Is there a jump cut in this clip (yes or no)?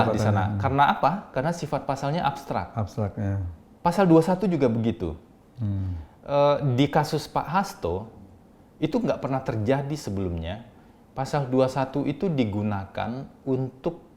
no